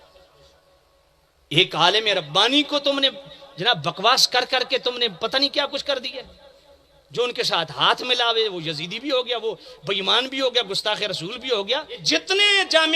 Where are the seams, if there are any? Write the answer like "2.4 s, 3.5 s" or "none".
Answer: 12.0 s